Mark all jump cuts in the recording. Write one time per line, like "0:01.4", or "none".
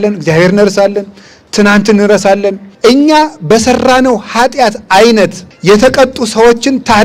0:02.6
0:05.5